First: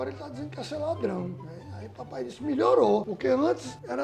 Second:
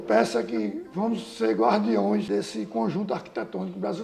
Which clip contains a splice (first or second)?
second